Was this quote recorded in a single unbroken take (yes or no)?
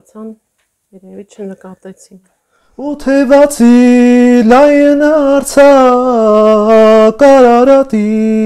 no